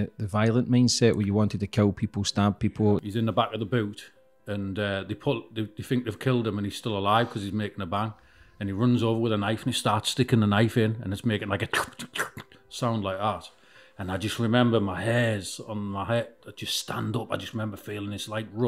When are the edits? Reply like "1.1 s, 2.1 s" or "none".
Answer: 3.0 s